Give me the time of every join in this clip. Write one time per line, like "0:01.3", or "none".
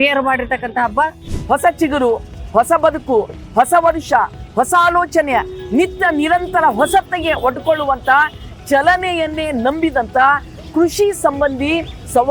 0:01.2